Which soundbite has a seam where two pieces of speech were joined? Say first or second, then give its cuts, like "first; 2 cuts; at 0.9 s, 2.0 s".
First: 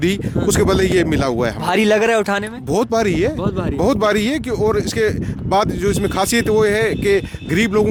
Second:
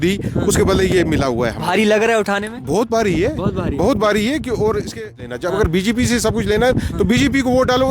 second; 1 cut; at 4.9 s